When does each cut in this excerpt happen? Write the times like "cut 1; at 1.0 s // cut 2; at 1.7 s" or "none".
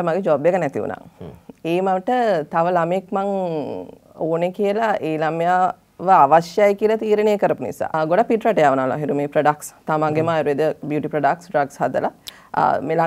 cut 1; at 8.0 s // cut 2; at 12.2 s